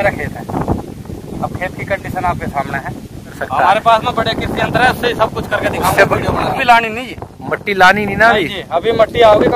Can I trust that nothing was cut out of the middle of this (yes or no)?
no